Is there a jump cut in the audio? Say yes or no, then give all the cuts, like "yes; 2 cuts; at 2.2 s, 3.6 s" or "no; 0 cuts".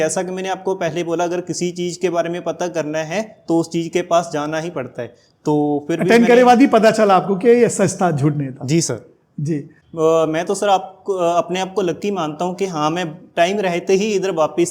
yes; 1 cut; at 9.8 s